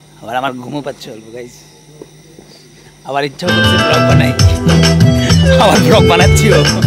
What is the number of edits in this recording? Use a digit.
0